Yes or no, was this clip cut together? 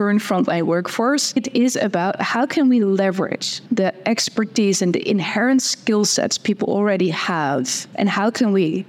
yes